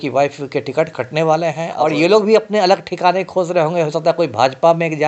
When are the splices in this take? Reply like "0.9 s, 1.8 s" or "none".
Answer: 1.7 s